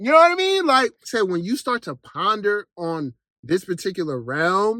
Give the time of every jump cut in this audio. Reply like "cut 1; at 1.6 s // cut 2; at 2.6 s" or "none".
cut 1; at 1.0 s

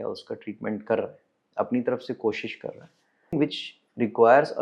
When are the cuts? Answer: cut 1; at 3.3 s

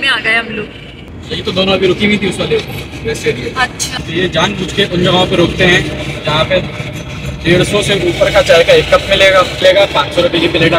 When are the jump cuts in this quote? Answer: cut 1; at 1.1 s // cut 2; at 3.9 s

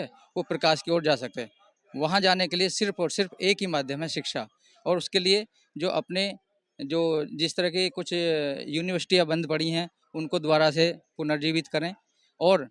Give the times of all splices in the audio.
none

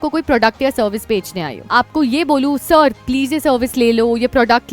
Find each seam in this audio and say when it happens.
cut 1; at 1.6 s

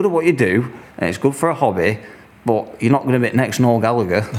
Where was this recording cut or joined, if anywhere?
none

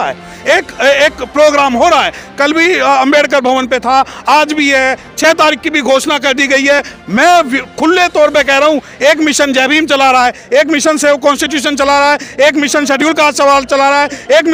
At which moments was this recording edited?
none

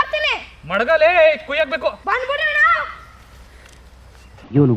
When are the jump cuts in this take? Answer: cut 1; at 2.0 s

